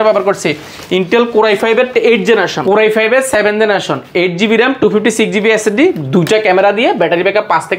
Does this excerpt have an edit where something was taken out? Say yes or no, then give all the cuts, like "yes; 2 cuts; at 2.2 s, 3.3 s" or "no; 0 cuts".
yes; 1 cut; at 2.5 s